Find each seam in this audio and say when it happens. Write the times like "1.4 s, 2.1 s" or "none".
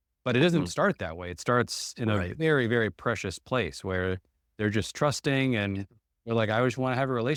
none